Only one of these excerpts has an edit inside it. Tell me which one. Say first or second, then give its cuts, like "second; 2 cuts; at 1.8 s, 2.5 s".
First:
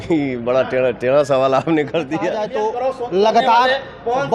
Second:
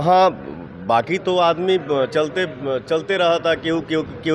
first; 1 cut; at 2.4 s